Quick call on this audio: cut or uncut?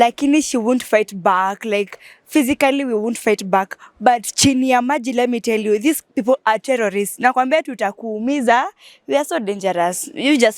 uncut